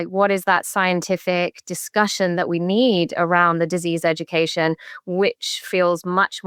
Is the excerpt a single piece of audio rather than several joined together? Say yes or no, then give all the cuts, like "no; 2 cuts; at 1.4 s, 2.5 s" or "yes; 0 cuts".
yes; 0 cuts